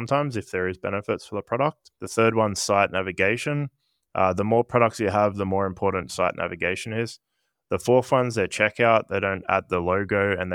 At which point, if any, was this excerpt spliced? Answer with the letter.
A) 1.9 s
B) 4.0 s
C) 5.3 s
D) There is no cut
A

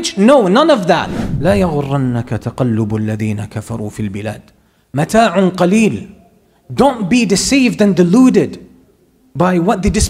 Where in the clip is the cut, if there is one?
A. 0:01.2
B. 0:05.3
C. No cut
A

